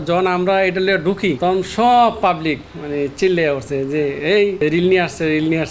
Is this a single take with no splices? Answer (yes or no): no